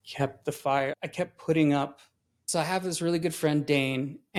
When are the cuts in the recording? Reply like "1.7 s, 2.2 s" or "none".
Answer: none